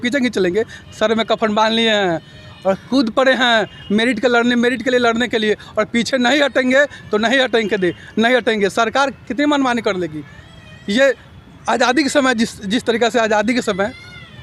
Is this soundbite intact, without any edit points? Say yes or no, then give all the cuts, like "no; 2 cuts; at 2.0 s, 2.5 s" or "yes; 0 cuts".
yes; 0 cuts